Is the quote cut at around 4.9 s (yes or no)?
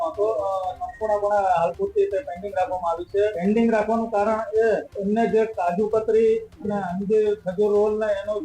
yes